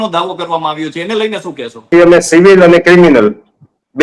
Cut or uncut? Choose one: cut